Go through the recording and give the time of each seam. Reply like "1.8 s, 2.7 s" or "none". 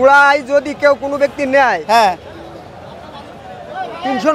none